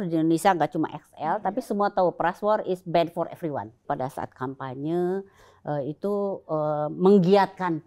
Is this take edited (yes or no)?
yes